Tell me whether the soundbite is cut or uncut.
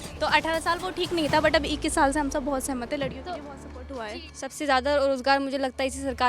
cut